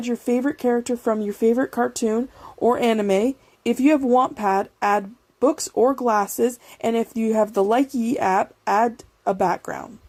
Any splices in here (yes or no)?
no